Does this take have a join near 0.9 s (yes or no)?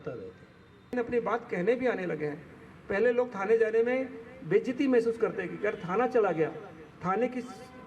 yes